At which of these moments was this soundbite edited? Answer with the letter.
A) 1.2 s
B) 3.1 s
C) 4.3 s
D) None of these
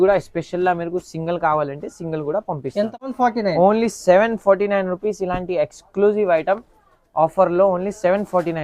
B